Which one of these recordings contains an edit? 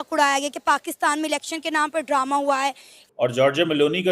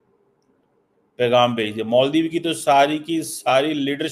first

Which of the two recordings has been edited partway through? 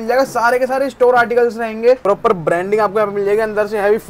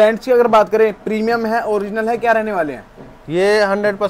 first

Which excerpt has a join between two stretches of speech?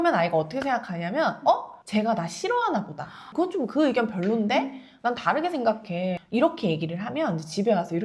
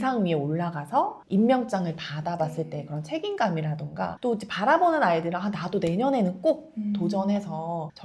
first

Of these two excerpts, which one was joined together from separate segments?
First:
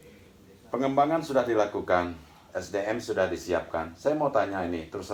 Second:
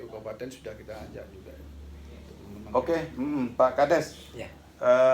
second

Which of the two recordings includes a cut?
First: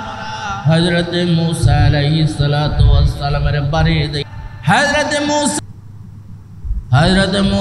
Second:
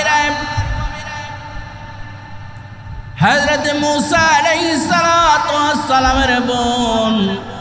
first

